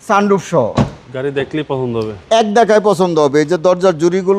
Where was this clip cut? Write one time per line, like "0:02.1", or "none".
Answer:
none